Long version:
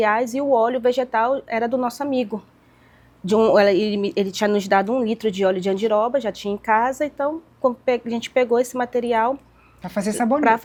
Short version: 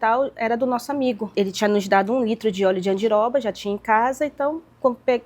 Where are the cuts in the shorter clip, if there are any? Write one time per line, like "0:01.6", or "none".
0:01.3